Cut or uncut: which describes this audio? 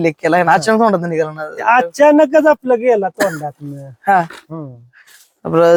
uncut